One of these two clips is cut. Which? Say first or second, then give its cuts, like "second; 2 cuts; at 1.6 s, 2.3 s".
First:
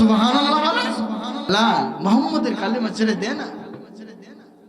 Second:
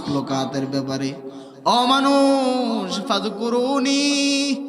first; 1 cut; at 1.5 s